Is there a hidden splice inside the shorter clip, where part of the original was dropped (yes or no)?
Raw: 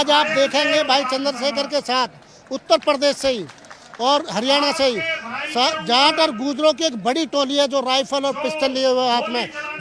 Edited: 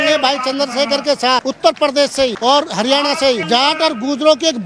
yes